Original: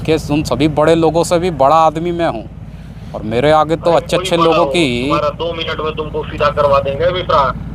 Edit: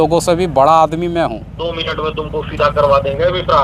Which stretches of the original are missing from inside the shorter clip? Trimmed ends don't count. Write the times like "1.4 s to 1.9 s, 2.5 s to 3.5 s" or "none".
2.7 s to 5.5 s